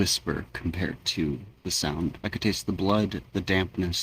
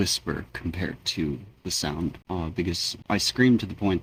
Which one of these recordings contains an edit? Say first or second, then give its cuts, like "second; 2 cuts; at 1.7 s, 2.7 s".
first; 1 cut; at 2.2 s